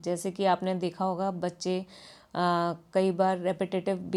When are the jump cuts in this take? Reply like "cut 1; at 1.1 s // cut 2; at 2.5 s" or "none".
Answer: none